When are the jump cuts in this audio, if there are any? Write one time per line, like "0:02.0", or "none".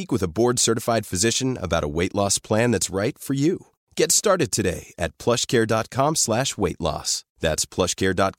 none